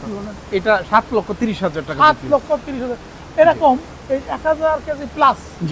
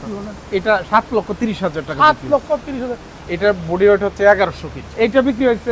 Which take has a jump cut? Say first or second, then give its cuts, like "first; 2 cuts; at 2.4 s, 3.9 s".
second; 2 cuts; at 3.2 s, 4.8 s